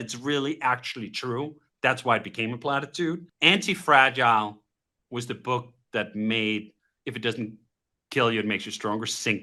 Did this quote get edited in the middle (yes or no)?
no